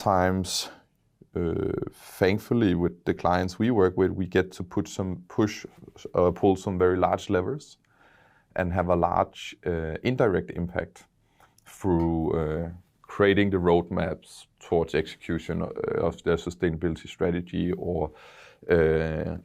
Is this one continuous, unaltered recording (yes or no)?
yes